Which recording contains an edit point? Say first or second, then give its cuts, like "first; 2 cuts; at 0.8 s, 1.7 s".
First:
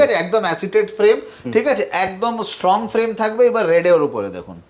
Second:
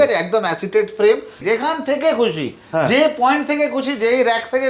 second; 1 cut; at 1.4 s